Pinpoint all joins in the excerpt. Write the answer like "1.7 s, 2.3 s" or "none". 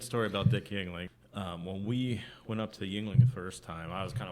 1.0 s